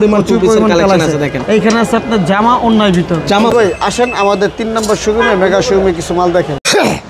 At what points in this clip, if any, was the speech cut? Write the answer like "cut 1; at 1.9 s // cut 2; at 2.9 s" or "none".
none